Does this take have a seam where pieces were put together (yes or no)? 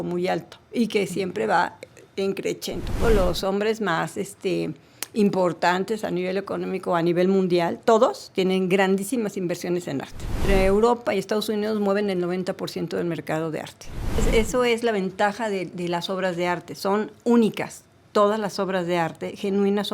yes